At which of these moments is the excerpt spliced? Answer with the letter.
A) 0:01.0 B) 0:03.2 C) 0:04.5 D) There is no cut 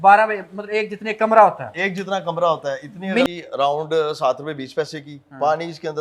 B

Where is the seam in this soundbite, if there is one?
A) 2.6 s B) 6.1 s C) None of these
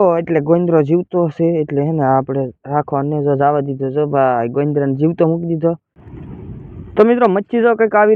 B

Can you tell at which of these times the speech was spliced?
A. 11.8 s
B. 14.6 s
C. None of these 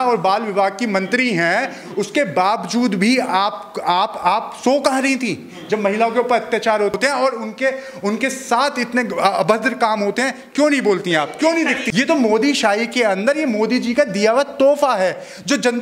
A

